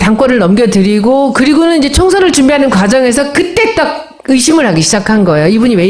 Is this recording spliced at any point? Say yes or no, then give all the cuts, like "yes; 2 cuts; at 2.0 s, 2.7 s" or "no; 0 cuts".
no; 0 cuts